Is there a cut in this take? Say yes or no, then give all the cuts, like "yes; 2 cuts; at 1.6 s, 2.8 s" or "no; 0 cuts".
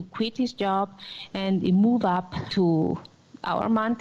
yes; 1 cut; at 2.5 s